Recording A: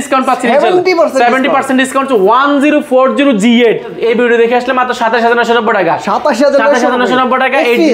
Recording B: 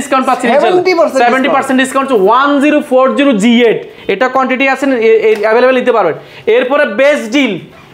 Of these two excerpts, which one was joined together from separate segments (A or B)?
A